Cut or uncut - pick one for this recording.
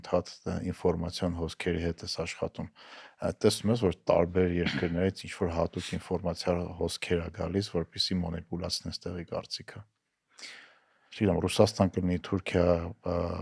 uncut